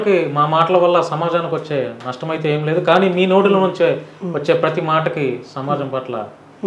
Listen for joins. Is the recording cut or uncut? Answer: uncut